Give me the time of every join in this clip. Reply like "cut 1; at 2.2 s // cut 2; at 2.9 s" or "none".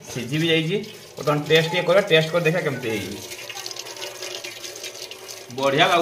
cut 1; at 3.4 s

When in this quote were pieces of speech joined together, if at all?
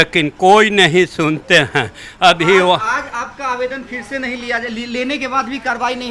none

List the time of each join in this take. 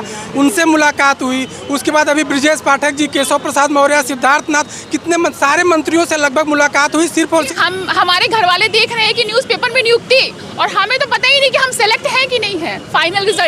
cut 1; at 7.5 s

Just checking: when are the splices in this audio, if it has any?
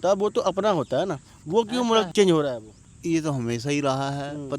cut 1; at 2.1 s

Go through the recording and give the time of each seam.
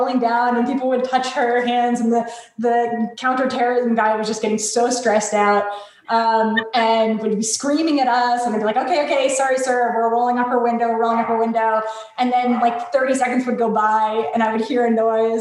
none

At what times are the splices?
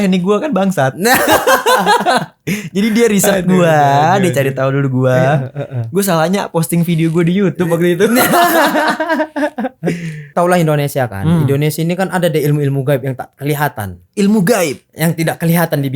cut 1; at 10.3 s

